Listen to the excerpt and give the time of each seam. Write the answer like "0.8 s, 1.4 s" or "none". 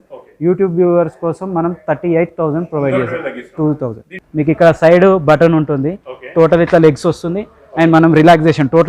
4.2 s